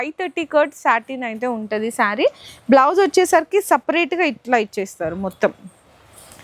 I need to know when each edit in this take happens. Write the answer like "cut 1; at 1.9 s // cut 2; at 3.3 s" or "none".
none